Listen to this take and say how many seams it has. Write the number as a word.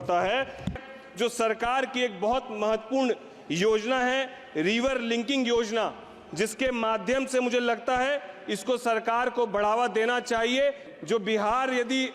two